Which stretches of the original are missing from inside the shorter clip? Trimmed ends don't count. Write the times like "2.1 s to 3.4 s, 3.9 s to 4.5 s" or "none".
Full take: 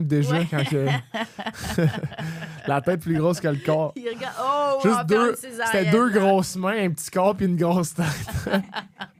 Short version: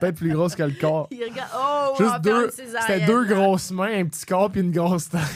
none